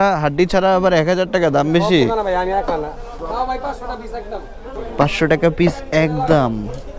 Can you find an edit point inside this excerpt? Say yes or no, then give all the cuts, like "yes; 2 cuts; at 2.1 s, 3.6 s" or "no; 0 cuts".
yes; 2 cuts; at 3.1 s, 4.7 s